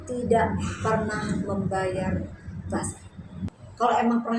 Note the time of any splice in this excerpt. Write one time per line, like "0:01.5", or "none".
0:03.4